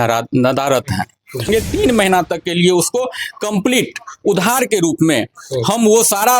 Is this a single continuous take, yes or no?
no